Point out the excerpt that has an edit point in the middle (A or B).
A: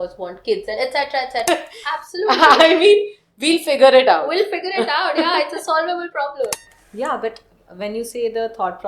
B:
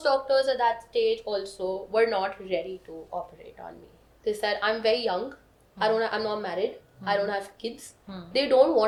A